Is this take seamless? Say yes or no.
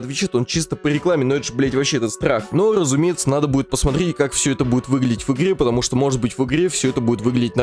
yes